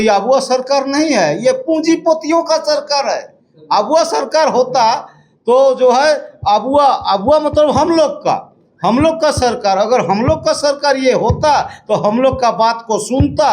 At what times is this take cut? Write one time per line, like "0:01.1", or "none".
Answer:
none